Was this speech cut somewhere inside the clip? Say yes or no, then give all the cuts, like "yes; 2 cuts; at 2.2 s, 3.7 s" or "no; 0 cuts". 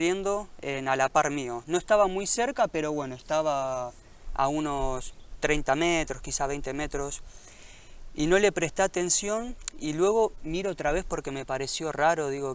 no; 0 cuts